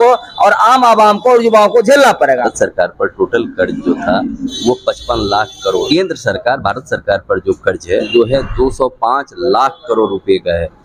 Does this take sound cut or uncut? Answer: cut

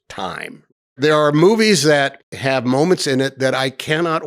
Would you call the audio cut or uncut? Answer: cut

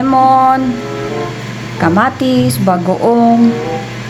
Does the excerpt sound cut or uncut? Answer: uncut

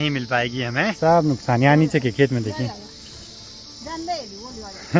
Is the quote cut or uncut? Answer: uncut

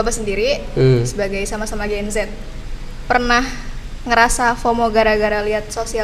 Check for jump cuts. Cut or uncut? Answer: uncut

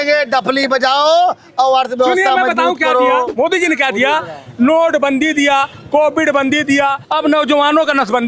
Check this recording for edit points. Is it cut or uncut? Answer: cut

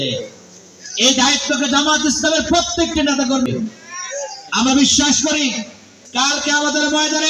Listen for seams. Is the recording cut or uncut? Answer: cut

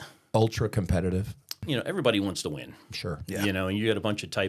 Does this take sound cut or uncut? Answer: cut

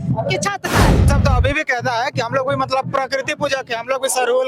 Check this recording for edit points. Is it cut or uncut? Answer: cut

